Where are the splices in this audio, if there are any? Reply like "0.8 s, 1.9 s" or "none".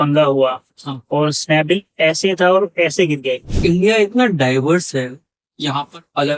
3.4 s

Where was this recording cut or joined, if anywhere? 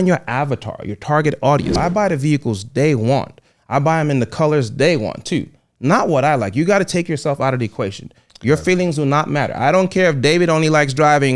1.8 s

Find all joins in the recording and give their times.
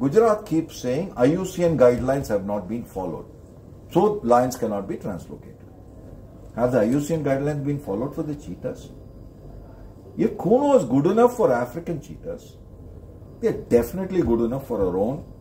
none

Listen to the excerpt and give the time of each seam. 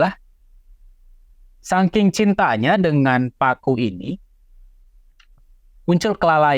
none

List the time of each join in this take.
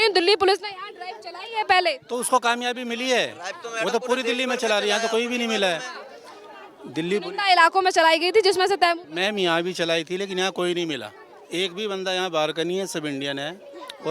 none

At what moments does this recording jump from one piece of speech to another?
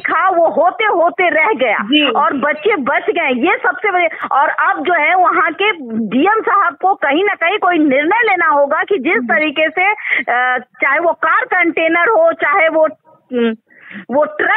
none

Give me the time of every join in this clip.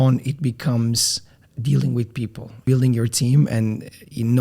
2.6 s

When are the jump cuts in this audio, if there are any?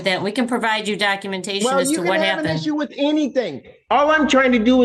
none

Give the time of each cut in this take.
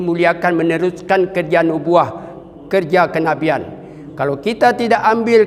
none

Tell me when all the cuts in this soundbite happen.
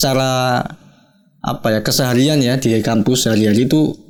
none

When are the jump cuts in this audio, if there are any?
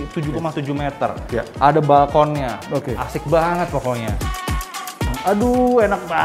4.6 s

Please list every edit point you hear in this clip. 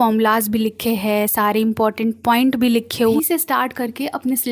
3.1 s

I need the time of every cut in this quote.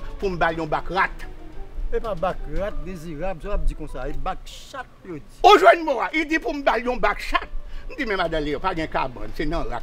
none

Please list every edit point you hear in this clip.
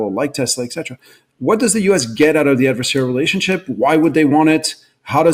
none

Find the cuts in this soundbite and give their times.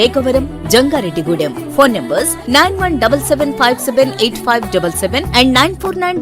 none

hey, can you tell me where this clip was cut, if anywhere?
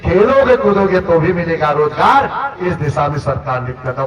none

